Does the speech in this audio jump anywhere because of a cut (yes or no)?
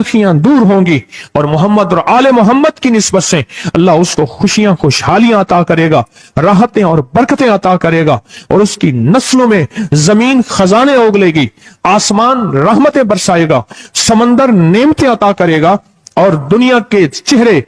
no